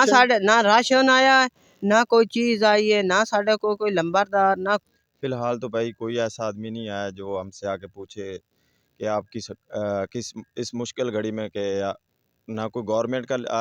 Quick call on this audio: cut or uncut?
cut